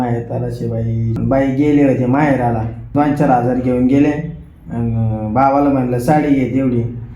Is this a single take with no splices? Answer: no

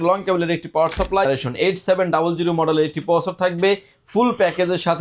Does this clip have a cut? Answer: yes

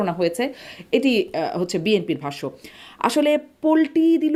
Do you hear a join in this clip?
no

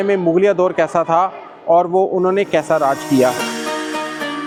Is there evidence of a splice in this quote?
no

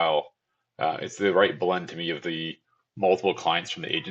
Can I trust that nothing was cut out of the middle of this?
yes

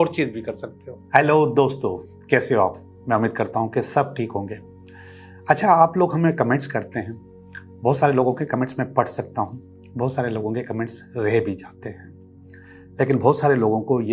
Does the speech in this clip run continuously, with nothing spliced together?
no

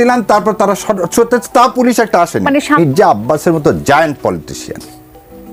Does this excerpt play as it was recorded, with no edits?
no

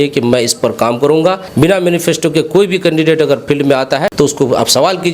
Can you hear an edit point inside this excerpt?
yes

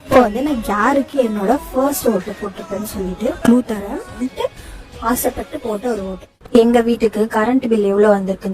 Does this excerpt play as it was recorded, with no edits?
no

